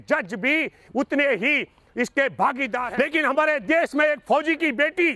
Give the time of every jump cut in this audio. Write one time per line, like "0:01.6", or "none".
0:02.9